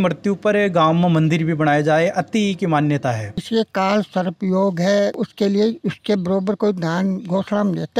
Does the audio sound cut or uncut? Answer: cut